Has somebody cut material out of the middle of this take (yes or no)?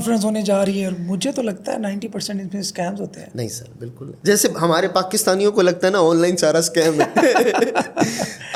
no